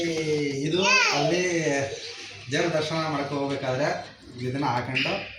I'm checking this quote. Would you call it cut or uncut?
uncut